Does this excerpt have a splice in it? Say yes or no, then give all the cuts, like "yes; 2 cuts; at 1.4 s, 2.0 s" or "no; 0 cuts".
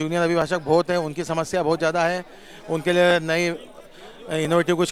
no; 0 cuts